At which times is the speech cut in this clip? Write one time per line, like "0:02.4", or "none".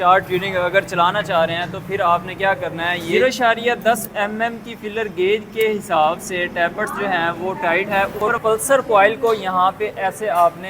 0:03.1
0:08.1